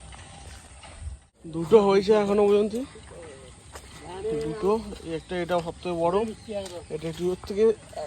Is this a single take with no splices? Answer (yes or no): no